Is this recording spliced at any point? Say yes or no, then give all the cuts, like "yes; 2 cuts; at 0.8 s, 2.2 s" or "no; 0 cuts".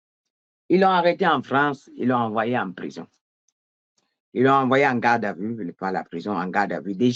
no; 0 cuts